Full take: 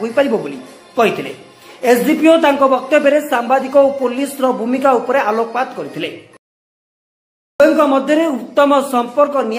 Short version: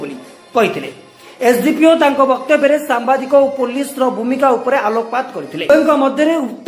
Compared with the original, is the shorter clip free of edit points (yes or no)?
no